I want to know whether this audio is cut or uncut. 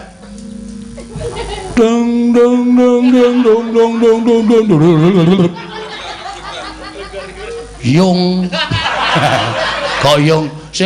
cut